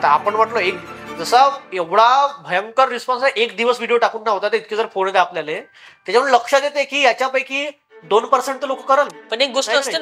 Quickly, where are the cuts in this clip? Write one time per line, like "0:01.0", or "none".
none